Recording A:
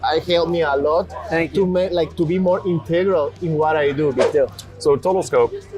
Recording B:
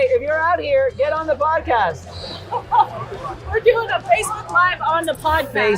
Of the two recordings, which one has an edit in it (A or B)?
A